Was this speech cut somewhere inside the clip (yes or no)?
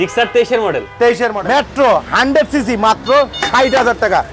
yes